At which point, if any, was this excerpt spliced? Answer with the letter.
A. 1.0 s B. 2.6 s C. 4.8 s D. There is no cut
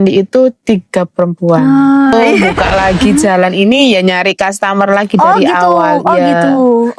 B